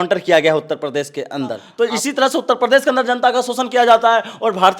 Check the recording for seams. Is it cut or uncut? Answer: cut